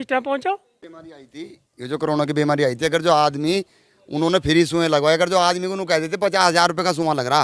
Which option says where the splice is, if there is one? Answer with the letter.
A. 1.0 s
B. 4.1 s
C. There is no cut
C